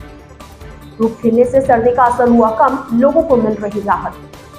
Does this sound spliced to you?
yes; 1 cut; at 0.9 s

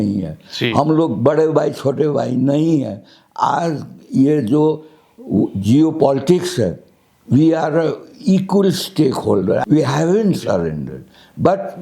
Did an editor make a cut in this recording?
yes; 1 cut; at 9.6 s

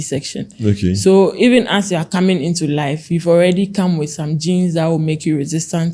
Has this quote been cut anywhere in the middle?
no; 0 cuts

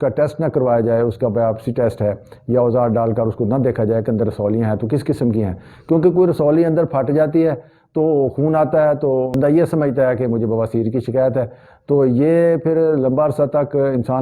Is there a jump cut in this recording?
yes; 1 cut; at 9.3 s

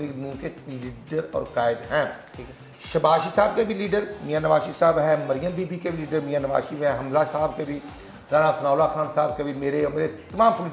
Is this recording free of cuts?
yes; 0 cuts

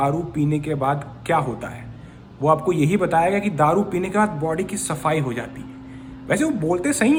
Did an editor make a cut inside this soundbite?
no; 0 cuts

